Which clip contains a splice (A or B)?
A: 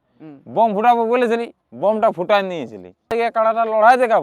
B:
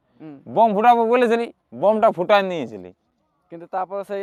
A